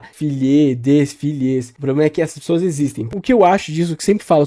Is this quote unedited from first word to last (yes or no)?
no